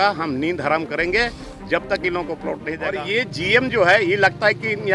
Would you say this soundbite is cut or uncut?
cut